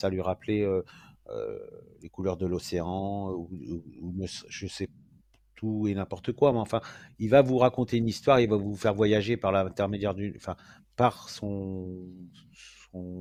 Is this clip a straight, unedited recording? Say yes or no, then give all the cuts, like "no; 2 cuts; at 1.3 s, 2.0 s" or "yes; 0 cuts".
yes; 0 cuts